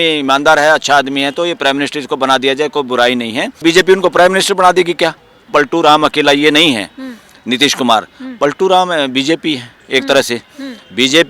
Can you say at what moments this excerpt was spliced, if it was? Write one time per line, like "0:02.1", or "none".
0:03.6
0:05.5